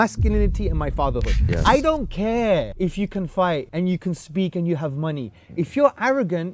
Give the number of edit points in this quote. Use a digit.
3